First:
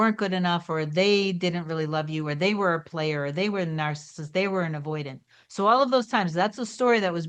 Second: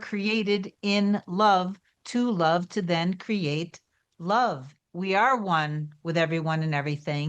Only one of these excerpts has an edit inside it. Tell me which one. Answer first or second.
second